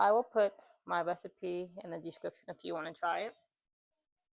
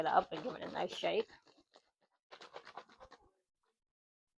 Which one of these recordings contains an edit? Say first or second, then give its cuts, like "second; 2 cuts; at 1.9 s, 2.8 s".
second; 1 cut; at 2.3 s